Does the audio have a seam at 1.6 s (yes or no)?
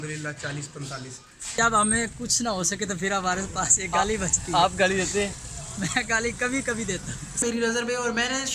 yes